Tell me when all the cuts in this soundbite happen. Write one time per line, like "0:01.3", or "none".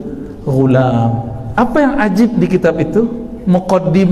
0:01.4